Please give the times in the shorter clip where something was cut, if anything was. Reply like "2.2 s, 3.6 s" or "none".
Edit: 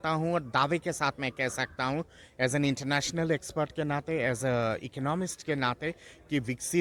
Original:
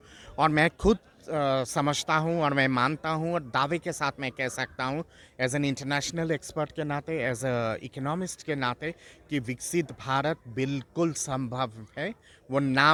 none